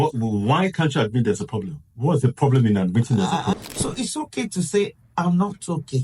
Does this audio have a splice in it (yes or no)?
yes